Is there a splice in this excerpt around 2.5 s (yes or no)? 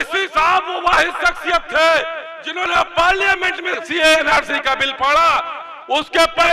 no